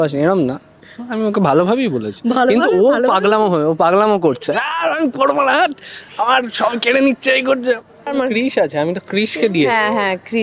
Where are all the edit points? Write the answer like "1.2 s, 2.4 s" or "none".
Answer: 8.1 s